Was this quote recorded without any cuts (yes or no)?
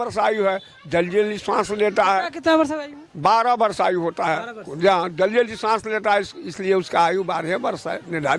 yes